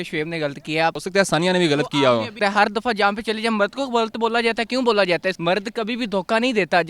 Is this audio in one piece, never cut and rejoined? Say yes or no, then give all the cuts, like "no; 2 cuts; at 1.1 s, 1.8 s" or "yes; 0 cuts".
no; 3 cuts; at 1.0 s, 2.3 s, 5.4 s